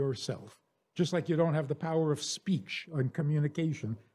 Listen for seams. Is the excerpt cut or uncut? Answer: uncut